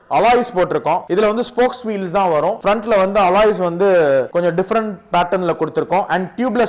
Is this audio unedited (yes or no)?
no